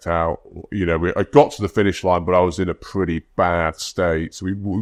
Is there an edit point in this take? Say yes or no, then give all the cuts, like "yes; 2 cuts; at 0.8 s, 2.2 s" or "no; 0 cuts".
no; 0 cuts